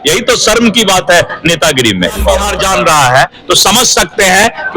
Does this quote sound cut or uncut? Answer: cut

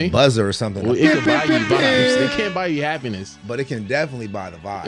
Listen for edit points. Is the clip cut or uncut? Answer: uncut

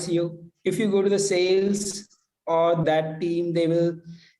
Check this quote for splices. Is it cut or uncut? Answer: cut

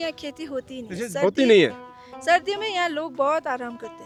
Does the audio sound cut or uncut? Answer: uncut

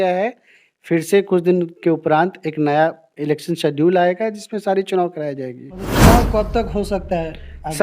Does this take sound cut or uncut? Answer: cut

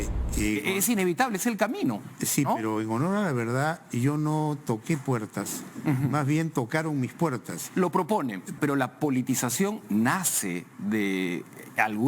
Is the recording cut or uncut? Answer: cut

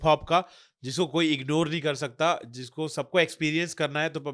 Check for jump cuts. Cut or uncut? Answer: uncut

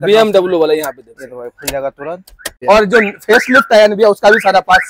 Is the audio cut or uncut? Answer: cut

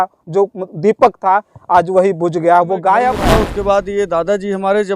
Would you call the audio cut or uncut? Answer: cut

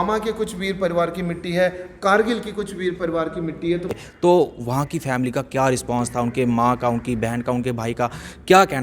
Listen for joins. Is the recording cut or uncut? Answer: cut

